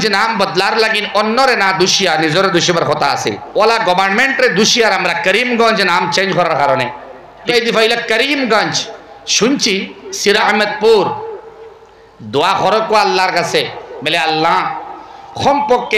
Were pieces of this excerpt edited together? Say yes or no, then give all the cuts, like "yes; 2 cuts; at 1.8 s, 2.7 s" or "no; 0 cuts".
yes; 3 cuts; at 3.4 s, 7.5 s, 10.4 s